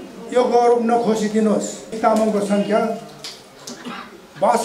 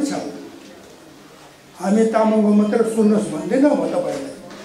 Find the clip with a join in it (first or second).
first